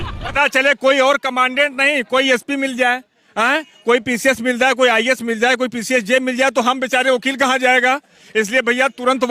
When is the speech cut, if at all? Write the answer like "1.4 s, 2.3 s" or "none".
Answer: none